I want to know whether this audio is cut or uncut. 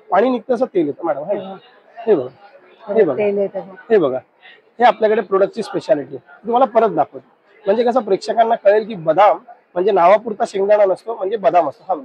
uncut